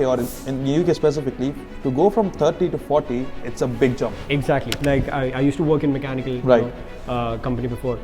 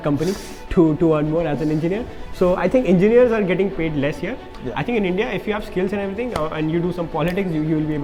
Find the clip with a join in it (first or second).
first